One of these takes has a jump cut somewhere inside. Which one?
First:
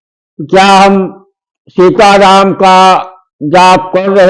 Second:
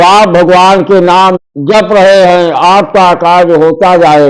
second; 1 cut; at 1.4 s

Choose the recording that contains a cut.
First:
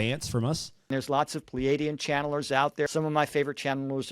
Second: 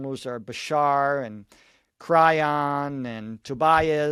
first; 2 cuts; at 0.9 s, 2.9 s

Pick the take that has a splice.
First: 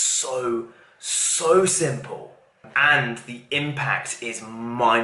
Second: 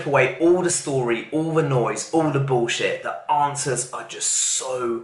first; 1 cut; at 2.7 s

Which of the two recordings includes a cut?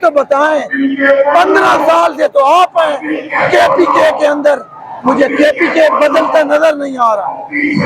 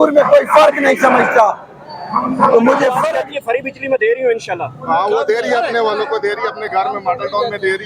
second; 1 cut; at 3.0 s

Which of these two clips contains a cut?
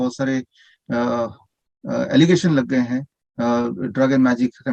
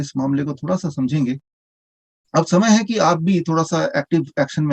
second; 1 cut; at 1.5 s

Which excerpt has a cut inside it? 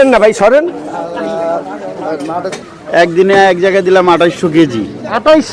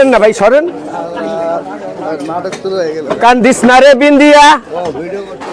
first; 1 cut; at 2.6 s

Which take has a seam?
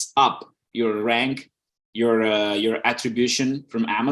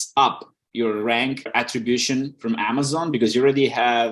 second; 1 cut; at 1.5 s

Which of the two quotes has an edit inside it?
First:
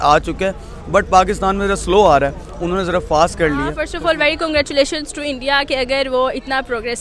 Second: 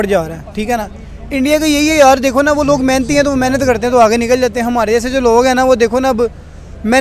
first; 1 cut; at 3.7 s

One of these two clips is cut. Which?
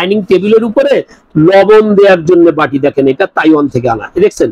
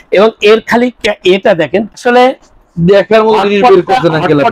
second; 1 cut; at 1.9 s

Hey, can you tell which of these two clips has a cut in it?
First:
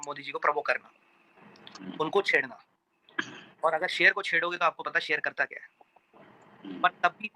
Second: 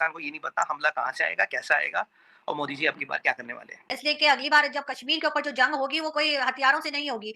second; 1 cut; at 3.9 s

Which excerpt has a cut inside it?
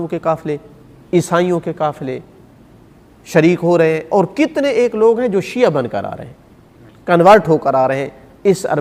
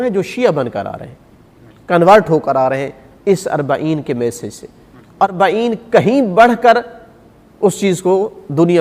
second; 1 cut; at 5.2 s

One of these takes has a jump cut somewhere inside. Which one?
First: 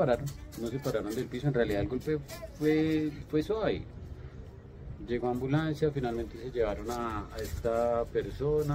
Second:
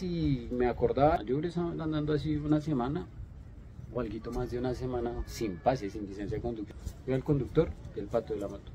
second; 2 cuts; at 1.2 s, 6.6 s

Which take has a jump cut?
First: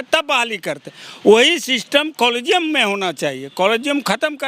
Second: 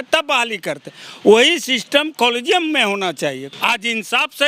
second; 1 cut; at 3.4 s

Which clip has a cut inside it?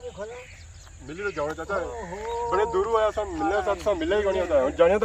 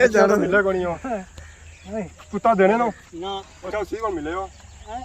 second; 1 cut; at 3.7 s

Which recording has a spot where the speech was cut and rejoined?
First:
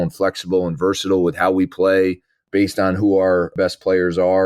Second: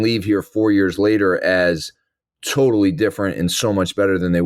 first; 2 cuts; at 2.4 s, 3.5 s

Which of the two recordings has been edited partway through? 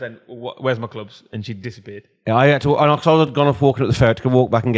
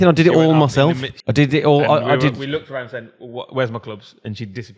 second; 1 cut; at 1.1 s

